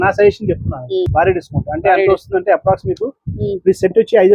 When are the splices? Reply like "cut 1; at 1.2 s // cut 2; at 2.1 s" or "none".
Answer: cut 1; at 1.1 s